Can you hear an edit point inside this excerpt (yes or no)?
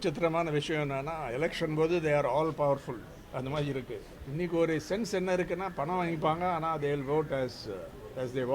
yes